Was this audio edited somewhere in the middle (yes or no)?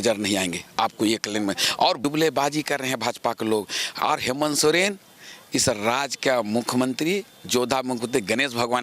yes